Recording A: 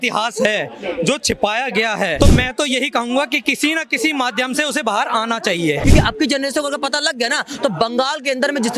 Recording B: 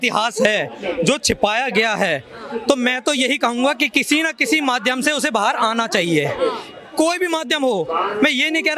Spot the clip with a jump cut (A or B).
A